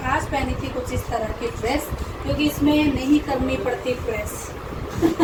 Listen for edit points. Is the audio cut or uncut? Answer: uncut